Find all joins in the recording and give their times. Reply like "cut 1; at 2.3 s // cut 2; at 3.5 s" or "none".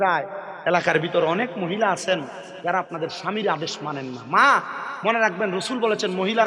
none